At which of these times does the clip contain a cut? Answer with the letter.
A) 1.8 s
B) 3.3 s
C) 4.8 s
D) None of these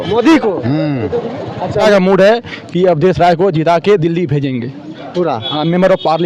A